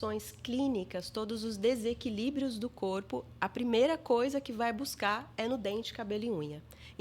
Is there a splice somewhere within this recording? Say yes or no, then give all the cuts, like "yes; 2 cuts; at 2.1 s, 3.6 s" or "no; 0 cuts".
no; 0 cuts